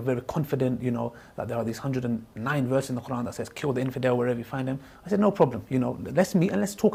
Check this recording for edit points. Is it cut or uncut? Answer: uncut